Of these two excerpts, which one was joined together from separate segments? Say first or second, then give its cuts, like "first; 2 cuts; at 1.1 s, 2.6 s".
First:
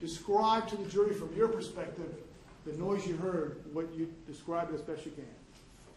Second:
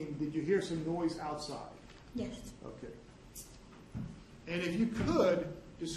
second; 1 cut; at 3.4 s